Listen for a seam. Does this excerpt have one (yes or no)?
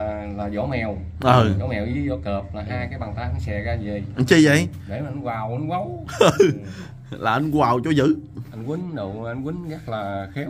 no